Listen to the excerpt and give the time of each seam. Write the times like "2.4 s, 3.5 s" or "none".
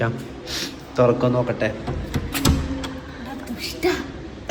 none